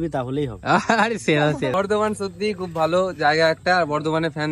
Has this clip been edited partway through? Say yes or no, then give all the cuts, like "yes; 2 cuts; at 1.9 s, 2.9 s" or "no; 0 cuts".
yes; 1 cut; at 1.7 s